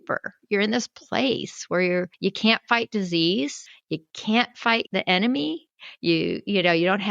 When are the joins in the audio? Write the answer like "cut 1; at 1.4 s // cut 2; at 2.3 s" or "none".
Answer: cut 1; at 2.1 s